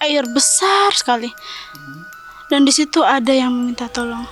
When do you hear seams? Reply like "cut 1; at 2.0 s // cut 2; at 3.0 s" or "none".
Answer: none